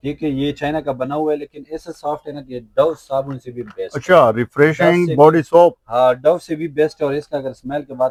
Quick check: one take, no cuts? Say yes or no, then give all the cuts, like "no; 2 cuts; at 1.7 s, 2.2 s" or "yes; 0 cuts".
yes; 0 cuts